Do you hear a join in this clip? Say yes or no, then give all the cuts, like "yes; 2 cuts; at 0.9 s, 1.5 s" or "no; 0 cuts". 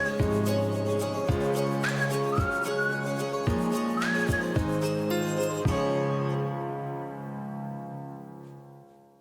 yes; 1 cut; at 5.6 s